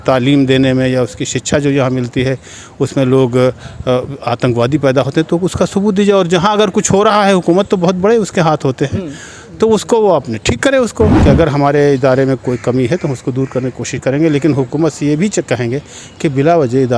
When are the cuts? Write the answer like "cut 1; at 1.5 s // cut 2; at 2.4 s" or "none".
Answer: cut 1; at 11.2 s